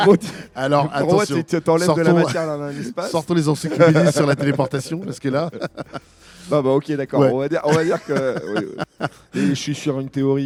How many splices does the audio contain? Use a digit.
0